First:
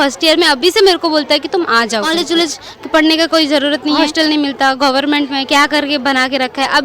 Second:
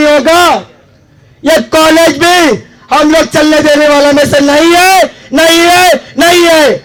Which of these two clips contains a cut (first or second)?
first